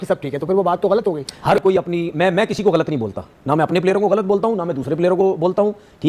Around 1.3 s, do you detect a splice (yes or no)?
yes